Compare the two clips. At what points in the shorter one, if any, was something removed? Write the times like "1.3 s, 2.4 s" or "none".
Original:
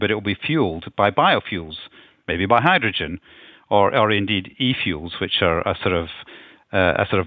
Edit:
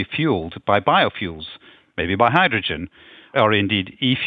3.3 s

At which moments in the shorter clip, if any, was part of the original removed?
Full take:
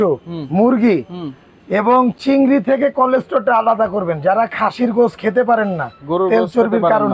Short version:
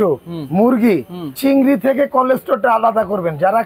1.3 s

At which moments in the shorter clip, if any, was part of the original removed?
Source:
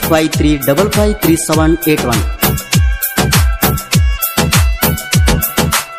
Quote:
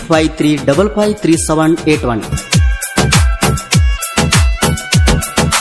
2.3 s

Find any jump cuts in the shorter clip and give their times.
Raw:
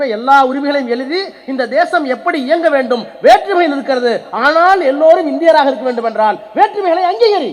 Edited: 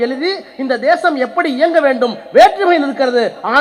none

